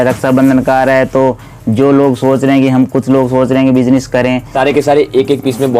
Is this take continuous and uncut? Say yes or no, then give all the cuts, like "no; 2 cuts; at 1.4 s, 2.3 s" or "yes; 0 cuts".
no; 1 cut; at 4.5 s